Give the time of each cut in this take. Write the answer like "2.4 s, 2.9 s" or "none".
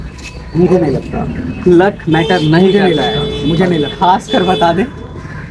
none